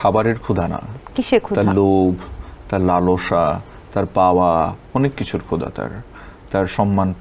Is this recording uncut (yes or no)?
yes